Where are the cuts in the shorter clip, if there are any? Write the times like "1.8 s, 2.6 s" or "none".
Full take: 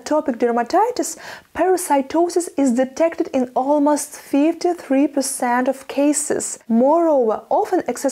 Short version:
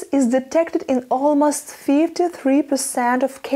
none